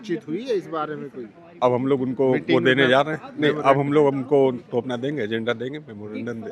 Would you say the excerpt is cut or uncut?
uncut